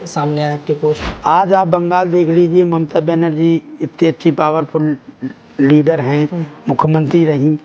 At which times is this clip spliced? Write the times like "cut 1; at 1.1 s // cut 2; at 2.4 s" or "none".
cut 1; at 1.1 s